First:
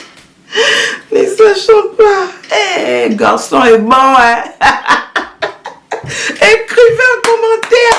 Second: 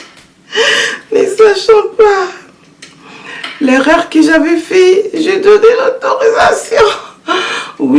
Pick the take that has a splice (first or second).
first